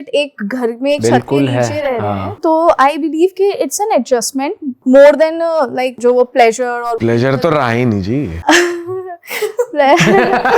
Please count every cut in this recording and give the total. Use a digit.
4